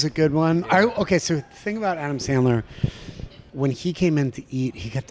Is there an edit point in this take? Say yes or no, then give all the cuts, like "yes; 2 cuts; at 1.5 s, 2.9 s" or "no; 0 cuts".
yes; 1 cut; at 3.4 s